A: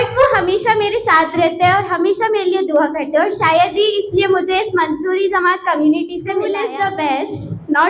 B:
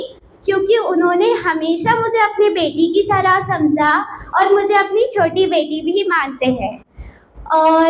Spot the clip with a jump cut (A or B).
A